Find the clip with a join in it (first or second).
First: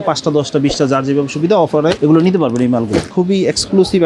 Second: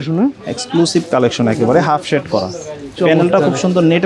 first